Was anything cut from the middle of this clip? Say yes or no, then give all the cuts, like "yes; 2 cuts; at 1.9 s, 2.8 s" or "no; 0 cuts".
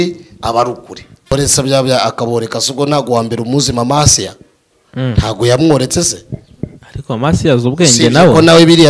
yes; 1 cut; at 1.3 s